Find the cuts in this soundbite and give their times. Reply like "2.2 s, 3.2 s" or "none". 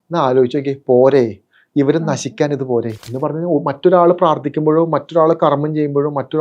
3.0 s